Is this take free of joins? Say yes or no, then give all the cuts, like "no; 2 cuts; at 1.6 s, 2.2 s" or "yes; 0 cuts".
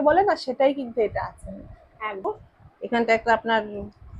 no; 1 cut; at 2.3 s